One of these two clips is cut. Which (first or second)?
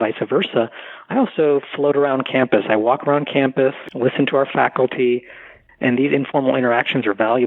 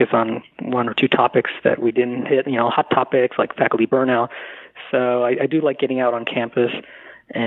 first